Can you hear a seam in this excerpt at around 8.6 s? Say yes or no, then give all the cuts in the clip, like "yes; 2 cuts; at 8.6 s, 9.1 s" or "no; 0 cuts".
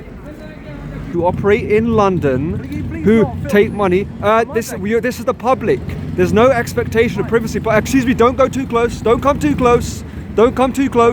no; 1 cut; at 1.0 s